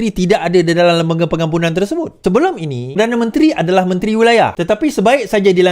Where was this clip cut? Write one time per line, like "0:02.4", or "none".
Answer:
0:02.1
0:03.0
0:04.6